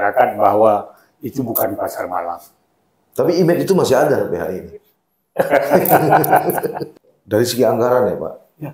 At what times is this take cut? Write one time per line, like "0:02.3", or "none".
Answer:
0:07.0